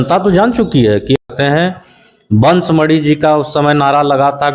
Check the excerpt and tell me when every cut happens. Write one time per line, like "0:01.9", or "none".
0:01.2